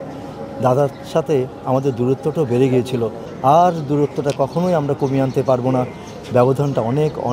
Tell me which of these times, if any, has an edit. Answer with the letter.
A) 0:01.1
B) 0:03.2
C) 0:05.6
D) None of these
B